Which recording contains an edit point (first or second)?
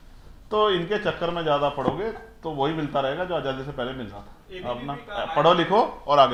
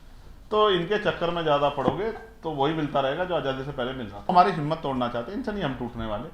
second